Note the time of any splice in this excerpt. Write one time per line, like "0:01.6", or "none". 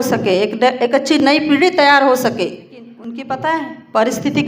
0:03.1